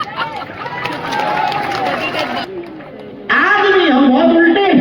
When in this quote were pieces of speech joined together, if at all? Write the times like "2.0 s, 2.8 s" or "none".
2.4 s

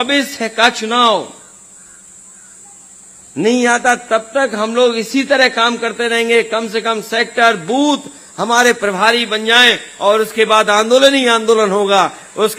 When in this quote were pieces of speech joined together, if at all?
none

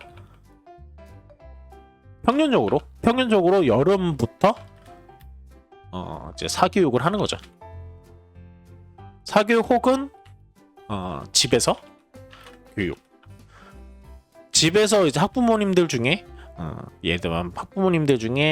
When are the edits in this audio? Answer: none

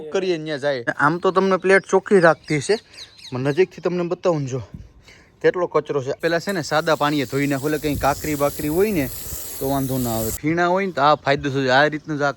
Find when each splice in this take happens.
0.9 s, 6.2 s, 10.3 s

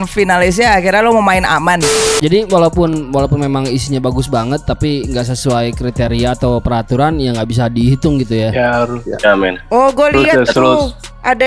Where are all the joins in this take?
2.1 s

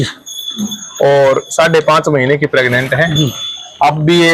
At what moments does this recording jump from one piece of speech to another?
none

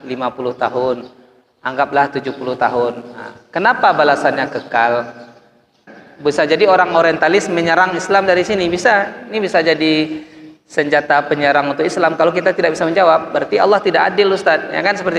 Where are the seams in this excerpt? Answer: 6.0 s

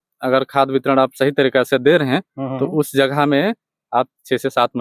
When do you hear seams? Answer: none

